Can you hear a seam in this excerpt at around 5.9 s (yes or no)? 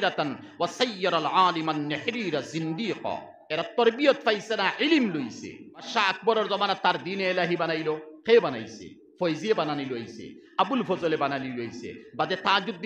yes